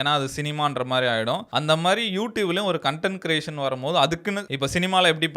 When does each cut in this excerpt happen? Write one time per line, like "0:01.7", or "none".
0:01.5